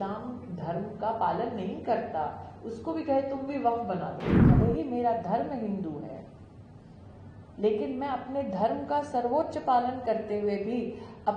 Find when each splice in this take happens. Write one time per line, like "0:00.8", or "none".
0:04.3